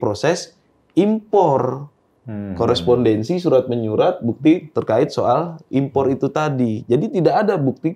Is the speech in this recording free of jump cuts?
yes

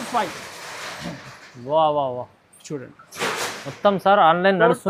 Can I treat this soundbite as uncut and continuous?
yes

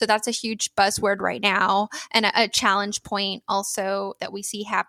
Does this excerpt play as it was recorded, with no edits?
yes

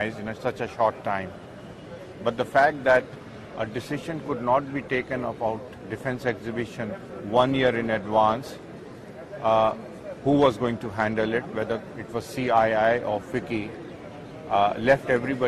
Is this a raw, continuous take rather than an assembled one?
yes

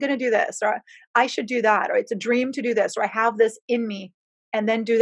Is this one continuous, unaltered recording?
yes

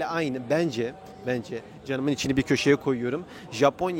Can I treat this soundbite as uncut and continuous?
yes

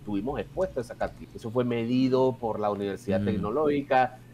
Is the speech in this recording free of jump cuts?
no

